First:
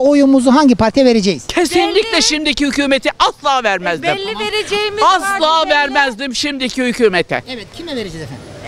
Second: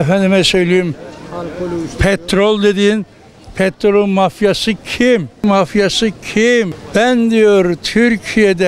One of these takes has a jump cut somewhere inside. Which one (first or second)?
second